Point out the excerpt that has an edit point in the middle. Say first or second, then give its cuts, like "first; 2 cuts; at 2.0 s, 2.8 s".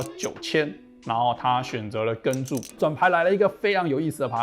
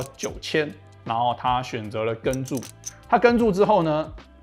first; 1 cut; at 2.7 s